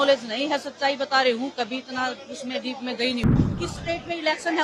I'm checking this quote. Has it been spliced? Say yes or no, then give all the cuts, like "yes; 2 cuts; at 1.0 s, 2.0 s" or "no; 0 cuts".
yes; 1 cut; at 3.3 s